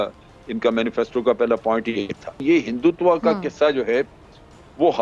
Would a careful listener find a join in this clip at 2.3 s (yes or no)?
yes